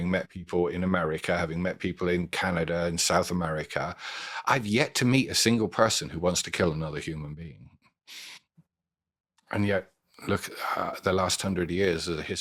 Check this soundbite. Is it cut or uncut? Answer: uncut